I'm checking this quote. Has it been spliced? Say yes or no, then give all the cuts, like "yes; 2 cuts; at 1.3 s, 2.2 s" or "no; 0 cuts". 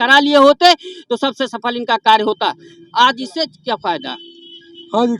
no; 0 cuts